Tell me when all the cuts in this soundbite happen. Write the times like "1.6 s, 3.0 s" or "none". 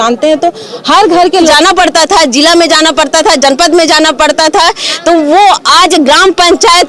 1.5 s